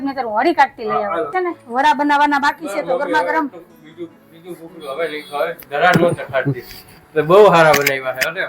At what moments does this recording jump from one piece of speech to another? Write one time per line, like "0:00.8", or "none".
0:01.3

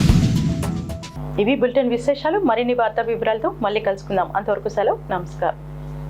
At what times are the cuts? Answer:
none

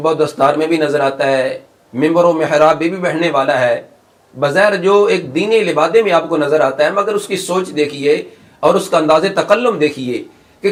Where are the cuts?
none

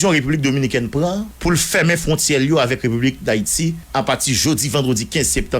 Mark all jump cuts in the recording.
0:01.3
0:03.8

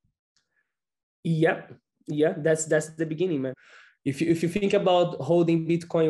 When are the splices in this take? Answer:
0:03.6

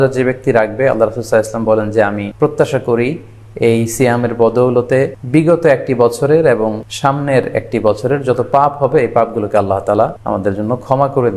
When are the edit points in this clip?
0:02.3
0:05.2
0:06.9
0:10.2

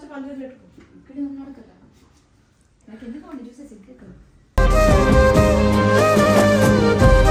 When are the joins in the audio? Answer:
none

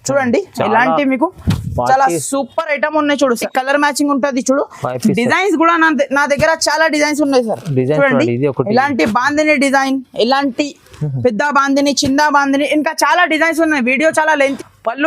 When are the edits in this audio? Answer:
0:03.4
0:14.4

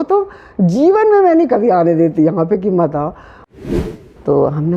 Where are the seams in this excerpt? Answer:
0:03.6

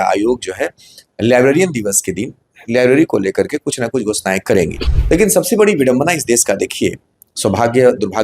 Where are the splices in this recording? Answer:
0:04.9

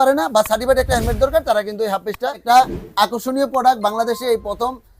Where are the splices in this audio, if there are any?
0:02.4

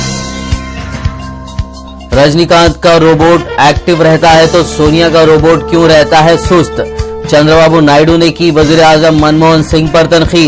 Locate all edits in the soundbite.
none

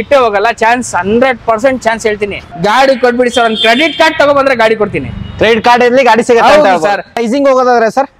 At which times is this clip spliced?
0:02.5
0:07.1

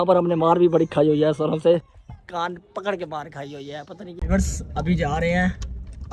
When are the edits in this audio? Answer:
0:04.1

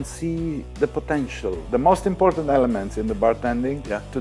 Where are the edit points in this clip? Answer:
0:01.5

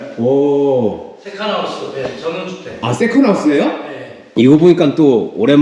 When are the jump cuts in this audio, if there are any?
0:04.2

